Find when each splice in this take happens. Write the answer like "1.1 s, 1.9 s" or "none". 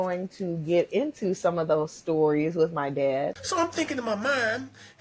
3.3 s